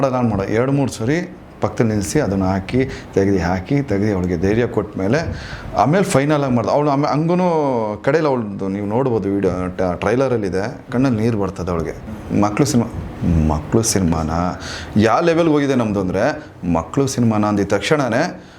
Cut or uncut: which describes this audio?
cut